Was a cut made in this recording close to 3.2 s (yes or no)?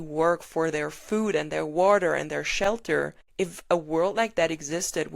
yes